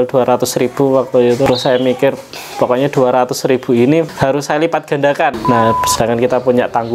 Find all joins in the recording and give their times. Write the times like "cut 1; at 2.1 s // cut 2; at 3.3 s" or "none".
cut 1; at 1.5 s // cut 2; at 4.1 s // cut 3; at 5.4 s